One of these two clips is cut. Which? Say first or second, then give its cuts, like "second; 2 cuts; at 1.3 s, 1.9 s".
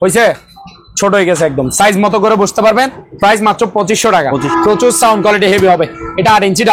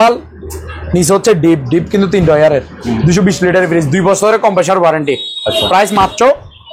first; 2 cuts; at 3.0 s, 4.5 s